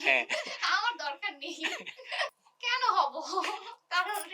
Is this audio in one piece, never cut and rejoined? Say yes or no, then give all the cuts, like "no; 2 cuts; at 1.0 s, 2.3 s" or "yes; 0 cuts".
no; 1 cut; at 2.3 s